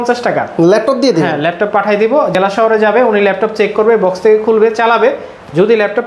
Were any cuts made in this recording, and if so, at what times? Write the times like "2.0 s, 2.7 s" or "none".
none